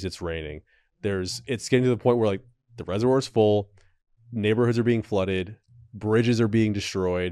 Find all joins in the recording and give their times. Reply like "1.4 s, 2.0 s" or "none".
none